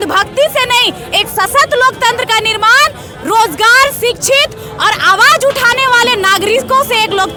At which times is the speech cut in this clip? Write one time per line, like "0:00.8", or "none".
none